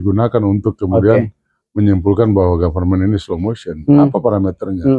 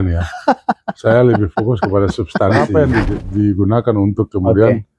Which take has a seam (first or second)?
second